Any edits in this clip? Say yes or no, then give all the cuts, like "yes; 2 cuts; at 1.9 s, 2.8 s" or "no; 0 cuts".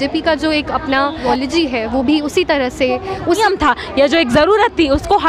yes; 2 cuts; at 1.3 s, 3.4 s